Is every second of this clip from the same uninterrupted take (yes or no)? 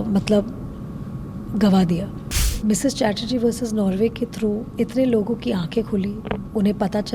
no